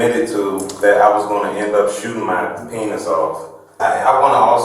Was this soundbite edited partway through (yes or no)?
yes